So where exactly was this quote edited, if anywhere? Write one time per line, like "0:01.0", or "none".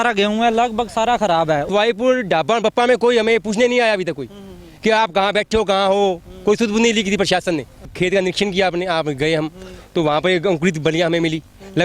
0:01.6
0:07.9